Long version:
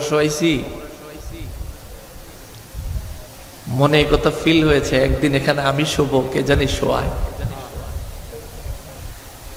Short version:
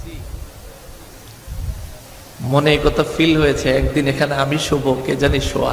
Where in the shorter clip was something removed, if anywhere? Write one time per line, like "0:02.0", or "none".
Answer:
none